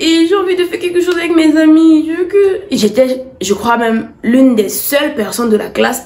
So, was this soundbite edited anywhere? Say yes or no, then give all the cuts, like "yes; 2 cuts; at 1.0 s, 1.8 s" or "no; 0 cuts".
yes; 1 cut; at 2.8 s